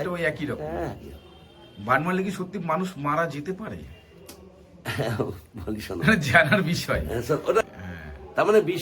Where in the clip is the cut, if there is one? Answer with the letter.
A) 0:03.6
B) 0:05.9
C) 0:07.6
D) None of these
C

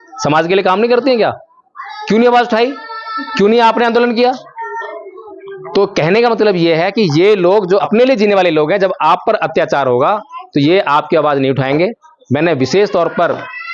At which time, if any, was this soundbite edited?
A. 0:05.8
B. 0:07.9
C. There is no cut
B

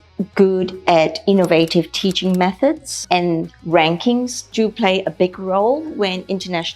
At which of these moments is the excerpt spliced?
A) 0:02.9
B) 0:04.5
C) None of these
A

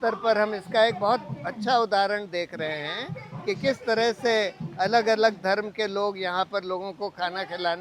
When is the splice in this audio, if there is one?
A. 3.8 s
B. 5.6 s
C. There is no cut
C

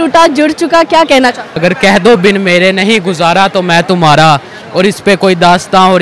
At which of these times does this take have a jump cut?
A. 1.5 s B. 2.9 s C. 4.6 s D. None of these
A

